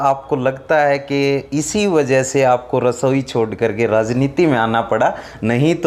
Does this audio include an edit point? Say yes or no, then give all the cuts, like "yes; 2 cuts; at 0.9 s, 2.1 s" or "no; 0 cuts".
no; 0 cuts